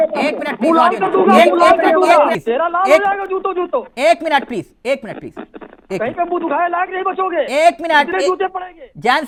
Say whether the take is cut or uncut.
uncut